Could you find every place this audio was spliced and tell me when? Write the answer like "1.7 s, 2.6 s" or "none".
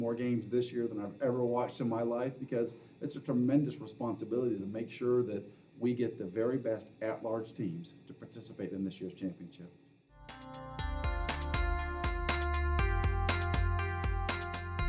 10.3 s